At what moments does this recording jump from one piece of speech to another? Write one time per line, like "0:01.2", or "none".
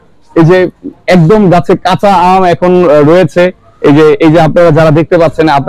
none